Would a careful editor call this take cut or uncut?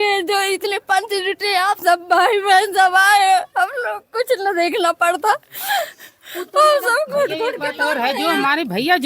uncut